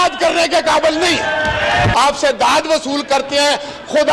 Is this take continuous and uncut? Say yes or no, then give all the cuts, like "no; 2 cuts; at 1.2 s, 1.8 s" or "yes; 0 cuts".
no; 1 cut; at 1.9 s